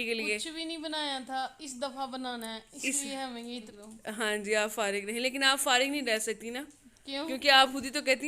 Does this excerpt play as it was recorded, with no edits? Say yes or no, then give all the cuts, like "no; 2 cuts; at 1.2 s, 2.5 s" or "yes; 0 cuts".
no; 1 cut; at 3.7 s